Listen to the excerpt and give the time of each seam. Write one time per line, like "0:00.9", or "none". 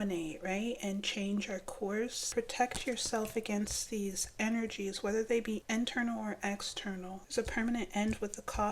0:02.2
0:05.6
0:07.2

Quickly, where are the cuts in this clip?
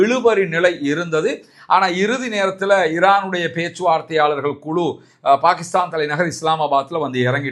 none

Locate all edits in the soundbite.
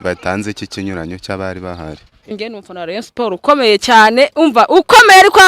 0:02.3

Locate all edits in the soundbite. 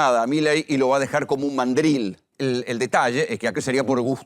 0:02.2
0:03.6

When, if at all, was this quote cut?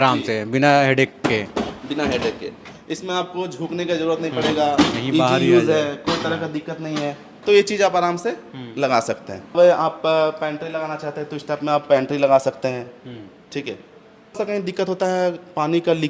none

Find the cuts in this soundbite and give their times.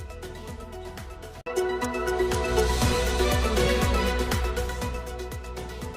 0:01.4
0:04.9

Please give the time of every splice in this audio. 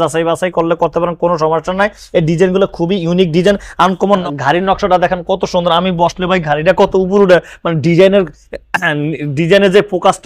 none

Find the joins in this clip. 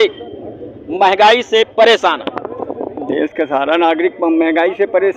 none

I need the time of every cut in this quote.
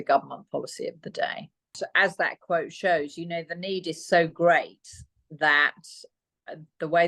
0:01.8

